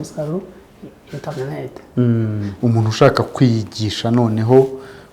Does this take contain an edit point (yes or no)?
yes